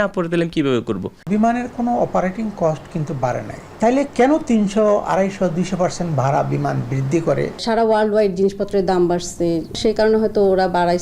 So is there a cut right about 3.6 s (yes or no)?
yes